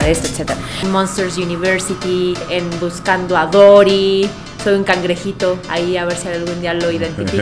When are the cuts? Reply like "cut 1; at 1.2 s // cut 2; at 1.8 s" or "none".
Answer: cut 1; at 0.8 s // cut 2; at 2.4 s